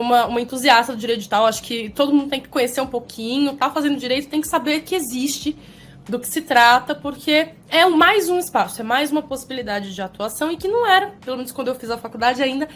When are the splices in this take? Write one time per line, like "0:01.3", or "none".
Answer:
none